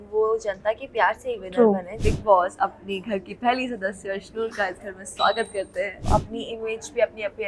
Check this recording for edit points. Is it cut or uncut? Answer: cut